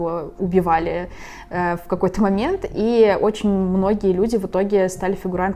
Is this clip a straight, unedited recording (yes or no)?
yes